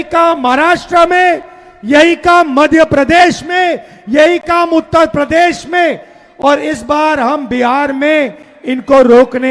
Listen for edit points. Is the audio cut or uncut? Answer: uncut